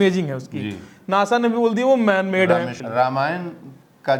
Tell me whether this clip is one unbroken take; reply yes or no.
no